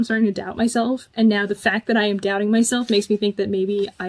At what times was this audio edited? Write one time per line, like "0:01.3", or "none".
none